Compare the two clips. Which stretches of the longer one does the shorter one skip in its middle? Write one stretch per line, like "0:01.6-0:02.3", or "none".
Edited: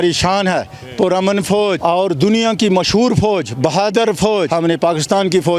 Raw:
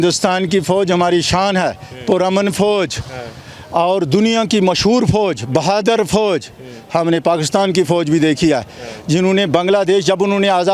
0:02.9-0:03.7
0:06.4-0:06.9